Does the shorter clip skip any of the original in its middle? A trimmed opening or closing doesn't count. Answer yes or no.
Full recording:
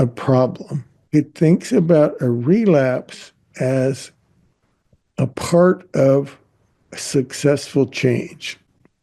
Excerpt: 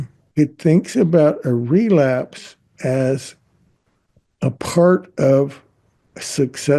no